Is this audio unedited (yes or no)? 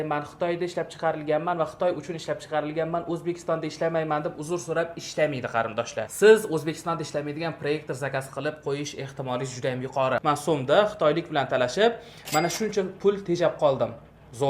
no